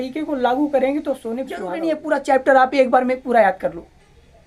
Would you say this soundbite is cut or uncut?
cut